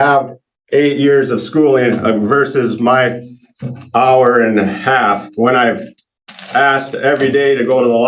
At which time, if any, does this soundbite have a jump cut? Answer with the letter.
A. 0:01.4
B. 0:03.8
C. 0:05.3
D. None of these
D